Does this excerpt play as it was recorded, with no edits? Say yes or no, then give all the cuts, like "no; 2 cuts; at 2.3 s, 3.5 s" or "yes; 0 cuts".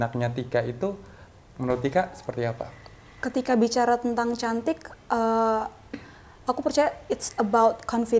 yes; 0 cuts